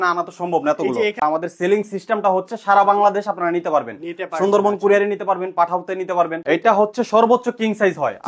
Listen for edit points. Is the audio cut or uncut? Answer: cut